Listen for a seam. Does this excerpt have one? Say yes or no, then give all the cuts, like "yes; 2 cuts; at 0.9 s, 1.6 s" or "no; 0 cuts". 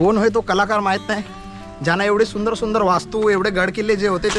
no; 0 cuts